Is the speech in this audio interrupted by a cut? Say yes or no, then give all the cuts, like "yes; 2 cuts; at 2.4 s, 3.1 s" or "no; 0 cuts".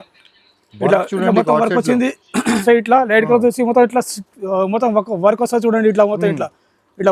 yes; 1 cut; at 2.6 s